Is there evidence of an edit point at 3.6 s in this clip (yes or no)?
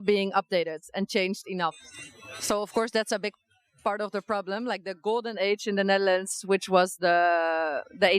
no